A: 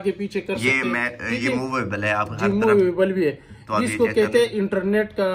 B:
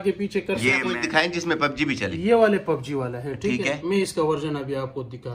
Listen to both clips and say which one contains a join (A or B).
B